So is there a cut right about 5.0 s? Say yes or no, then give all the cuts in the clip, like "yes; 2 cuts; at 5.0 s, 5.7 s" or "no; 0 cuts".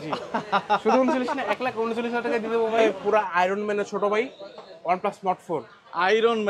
no; 1 cut; at 2.8 s